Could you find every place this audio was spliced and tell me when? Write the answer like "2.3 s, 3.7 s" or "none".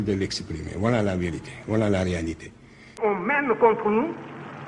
3.0 s